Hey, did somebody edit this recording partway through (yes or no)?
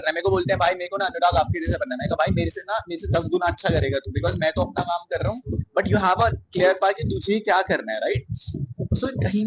no